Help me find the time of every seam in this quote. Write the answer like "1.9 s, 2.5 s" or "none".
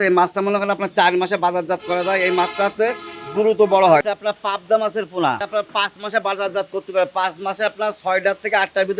4.0 s, 5.5 s